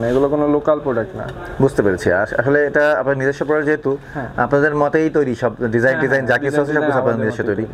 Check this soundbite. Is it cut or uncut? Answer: uncut